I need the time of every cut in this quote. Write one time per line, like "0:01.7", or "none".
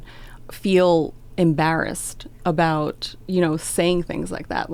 none